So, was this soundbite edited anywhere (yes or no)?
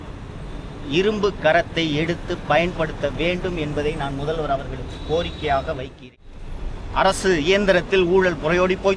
yes